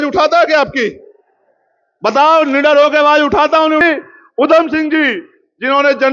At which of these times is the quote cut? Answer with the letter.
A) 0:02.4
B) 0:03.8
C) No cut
B